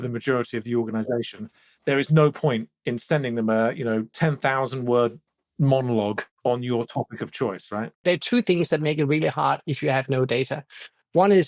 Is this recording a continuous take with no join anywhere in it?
no; 2 cuts; at 6.3 s, 8.0 s

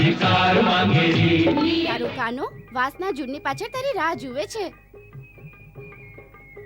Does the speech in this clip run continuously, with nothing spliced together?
no; 1 cut; at 1.9 s

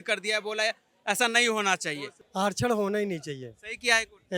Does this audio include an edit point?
no; 0 cuts

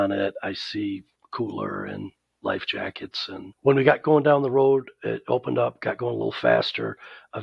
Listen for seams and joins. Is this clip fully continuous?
yes; 0 cuts

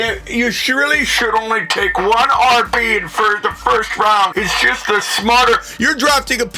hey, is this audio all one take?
no; 1 cut; at 4.3 s

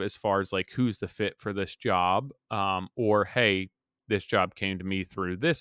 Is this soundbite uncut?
yes; 0 cuts

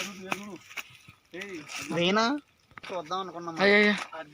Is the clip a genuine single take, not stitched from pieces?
yes; 0 cuts

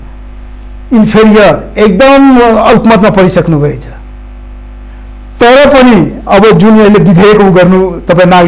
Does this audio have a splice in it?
no; 0 cuts

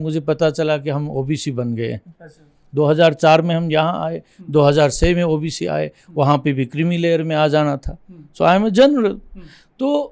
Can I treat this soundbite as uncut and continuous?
yes; 0 cuts

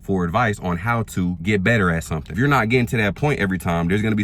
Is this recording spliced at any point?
yes; 2 cuts; at 1.4 s, 2.4 s

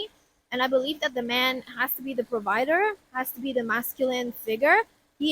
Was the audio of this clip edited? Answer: no; 0 cuts

